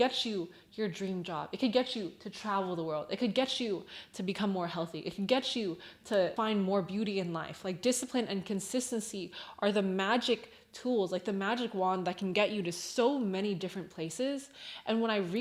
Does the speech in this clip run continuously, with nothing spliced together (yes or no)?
yes